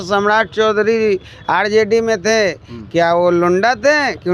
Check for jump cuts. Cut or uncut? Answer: uncut